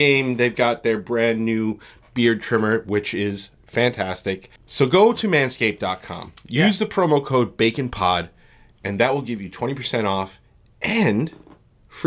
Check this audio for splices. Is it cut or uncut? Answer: cut